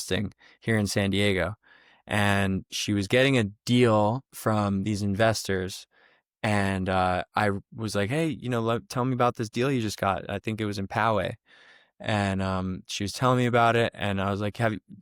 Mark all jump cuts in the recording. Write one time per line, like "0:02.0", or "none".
none